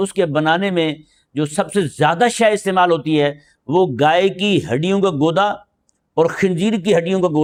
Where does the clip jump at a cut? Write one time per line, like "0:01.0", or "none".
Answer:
none